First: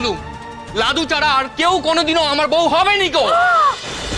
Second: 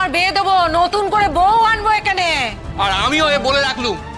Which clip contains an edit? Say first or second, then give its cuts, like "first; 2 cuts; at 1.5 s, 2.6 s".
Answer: second; 1 cut; at 2.6 s